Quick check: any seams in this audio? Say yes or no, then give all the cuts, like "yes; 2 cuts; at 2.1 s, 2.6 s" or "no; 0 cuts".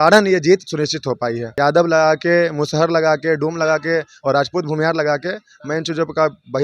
yes; 1 cut; at 1.5 s